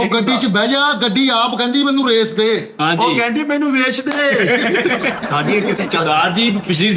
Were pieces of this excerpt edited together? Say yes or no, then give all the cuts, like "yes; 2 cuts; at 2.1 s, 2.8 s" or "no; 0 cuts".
no; 0 cuts